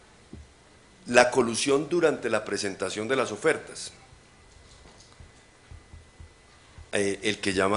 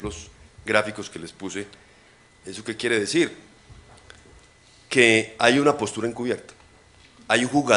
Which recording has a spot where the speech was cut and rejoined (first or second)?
first